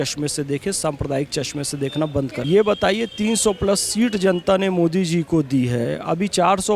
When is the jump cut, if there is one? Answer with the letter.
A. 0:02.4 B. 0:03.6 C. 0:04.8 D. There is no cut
A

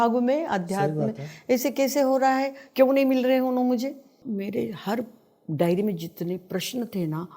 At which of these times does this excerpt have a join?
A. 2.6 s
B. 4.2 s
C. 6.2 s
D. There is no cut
B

